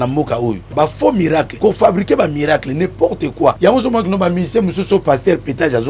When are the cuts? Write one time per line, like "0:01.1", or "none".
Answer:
0:00.7
0:01.5
0:03.6